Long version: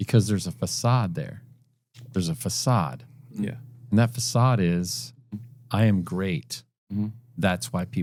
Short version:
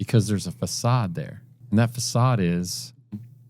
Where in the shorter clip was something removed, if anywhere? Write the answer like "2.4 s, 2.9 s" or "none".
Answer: 1.5 s